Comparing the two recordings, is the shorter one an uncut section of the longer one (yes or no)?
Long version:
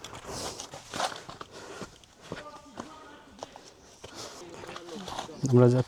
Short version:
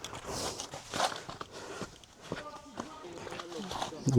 no